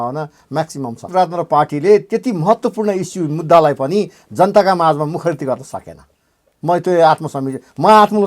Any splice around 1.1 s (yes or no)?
yes